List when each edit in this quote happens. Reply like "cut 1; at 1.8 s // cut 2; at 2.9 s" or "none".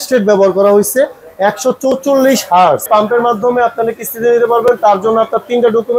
cut 1; at 2.9 s